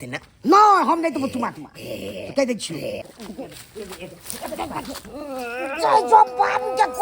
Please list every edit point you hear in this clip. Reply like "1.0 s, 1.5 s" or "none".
3.2 s